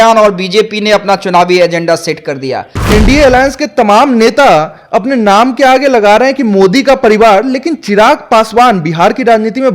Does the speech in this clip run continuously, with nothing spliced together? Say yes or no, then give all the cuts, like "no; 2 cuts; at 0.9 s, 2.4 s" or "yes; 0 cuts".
no; 1 cut; at 2.8 s